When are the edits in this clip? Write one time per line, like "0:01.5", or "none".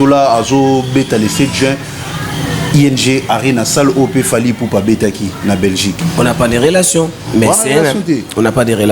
0:06.0